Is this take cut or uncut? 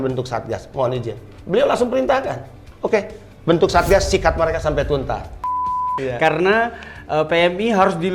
cut